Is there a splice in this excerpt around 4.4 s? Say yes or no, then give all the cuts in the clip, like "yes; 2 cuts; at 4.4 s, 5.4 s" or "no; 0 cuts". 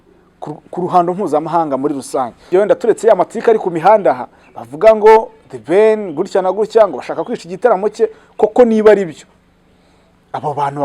no; 1 cut; at 2.4 s